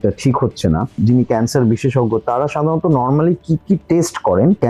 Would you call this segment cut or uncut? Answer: cut